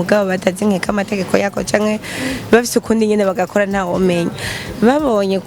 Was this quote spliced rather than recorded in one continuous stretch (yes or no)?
no